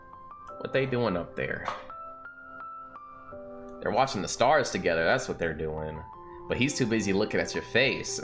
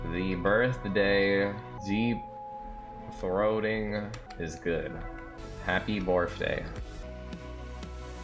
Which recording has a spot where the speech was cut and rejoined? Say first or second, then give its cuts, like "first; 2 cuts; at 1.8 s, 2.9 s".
second; 4 cuts; at 1.8 s, 4.2 s, 5.3 s, 7.0 s